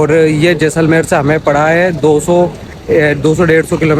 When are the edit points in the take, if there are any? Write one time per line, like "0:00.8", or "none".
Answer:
none